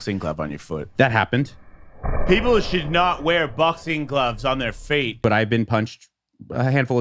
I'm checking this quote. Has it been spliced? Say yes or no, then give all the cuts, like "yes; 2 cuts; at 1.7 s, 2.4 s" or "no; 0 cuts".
yes; 1 cut; at 5.1 s